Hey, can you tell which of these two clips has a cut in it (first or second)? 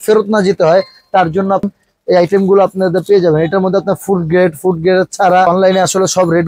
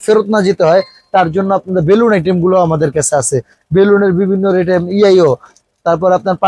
first